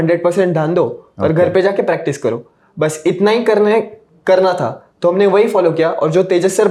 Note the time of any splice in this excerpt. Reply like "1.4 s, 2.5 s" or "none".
none